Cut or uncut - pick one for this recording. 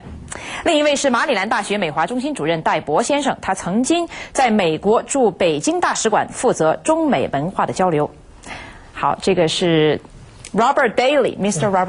cut